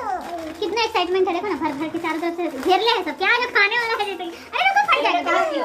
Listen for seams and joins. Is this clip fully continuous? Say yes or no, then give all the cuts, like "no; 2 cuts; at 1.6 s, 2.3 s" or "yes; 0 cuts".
yes; 0 cuts